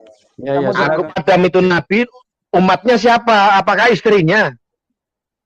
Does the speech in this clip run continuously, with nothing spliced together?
no; 1 cut; at 1.2 s

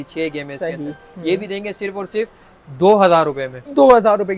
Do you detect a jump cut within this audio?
no; 0 cuts

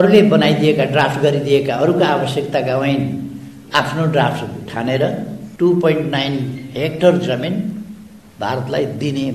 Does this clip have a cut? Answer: yes; 1 cut; at 5.4 s

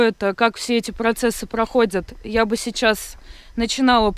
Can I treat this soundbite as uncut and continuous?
yes; 0 cuts

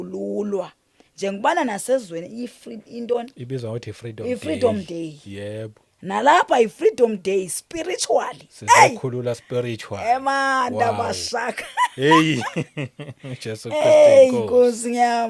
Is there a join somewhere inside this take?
no; 0 cuts

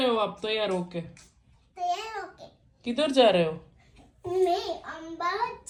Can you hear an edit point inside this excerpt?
no; 0 cuts

